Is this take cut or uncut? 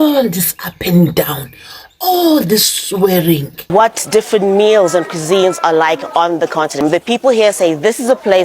cut